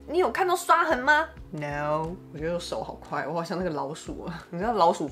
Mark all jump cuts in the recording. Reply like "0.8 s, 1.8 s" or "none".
2.2 s